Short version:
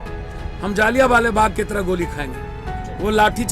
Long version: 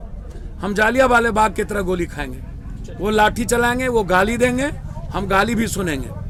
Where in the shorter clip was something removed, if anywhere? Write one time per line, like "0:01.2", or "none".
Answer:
none